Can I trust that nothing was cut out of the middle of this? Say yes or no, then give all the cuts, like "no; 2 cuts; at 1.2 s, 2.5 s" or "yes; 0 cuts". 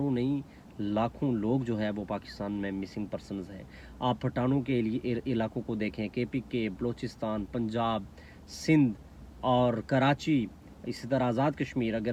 yes; 0 cuts